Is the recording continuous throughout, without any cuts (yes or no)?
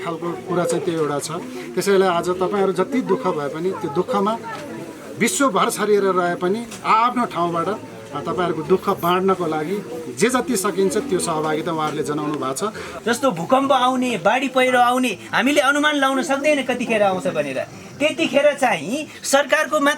no